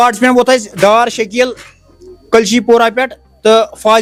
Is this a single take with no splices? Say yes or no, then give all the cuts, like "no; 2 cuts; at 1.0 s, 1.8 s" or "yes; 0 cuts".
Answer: yes; 0 cuts